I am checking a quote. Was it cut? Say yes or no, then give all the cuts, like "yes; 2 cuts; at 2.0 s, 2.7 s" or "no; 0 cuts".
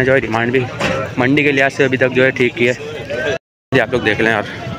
yes; 1 cut; at 3.7 s